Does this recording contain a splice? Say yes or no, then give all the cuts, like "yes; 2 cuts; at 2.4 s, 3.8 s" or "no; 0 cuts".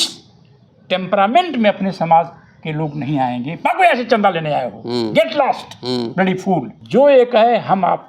yes; 1 cut; at 6.8 s